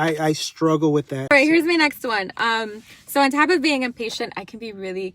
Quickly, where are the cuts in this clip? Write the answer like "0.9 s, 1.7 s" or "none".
1.3 s